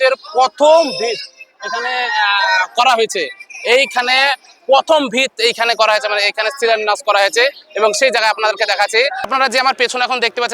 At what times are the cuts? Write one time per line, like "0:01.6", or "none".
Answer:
0:09.3